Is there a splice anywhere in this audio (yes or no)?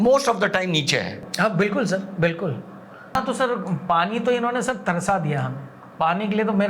yes